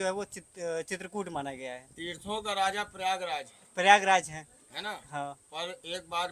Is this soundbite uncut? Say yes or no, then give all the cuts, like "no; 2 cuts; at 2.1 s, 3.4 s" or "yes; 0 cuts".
yes; 0 cuts